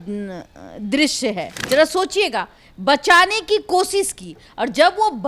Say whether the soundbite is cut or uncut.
cut